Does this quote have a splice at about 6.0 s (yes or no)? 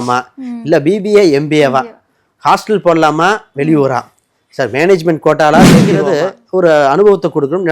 yes